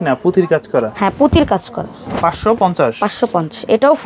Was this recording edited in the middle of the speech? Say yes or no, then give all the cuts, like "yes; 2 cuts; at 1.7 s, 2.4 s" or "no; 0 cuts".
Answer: no; 0 cuts